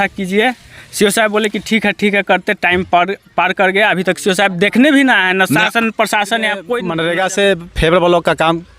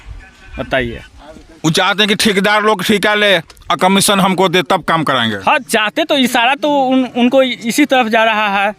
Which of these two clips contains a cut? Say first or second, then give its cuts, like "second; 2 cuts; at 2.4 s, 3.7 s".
first; 1 cut; at 6.8 s